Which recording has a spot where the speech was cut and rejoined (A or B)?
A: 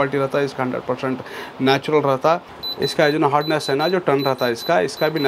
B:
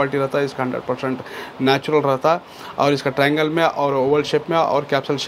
A